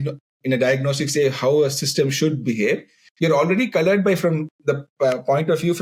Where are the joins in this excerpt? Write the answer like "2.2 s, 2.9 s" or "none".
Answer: none